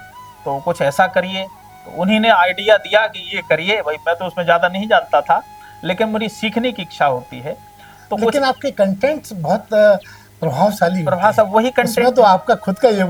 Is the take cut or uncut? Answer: uncut